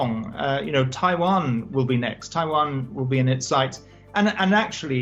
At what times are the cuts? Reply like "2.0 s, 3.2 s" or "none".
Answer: none